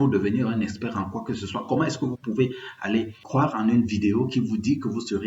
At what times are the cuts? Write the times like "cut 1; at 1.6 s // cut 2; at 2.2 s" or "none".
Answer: cut 1; at 3.2 s